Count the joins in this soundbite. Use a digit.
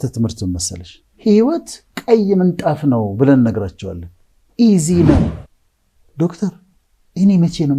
1